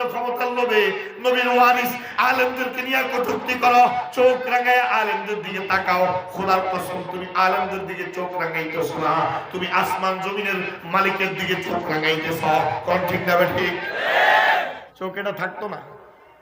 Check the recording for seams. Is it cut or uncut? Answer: cut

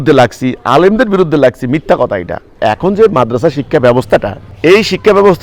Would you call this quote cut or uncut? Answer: cut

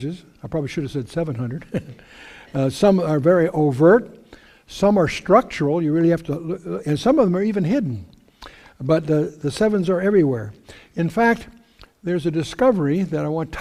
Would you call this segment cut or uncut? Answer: uncut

